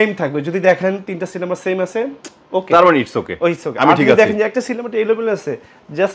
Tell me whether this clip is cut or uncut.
uncut